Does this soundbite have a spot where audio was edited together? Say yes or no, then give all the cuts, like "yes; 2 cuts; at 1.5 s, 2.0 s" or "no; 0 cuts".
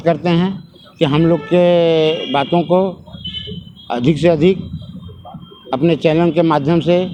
no; 0 cuts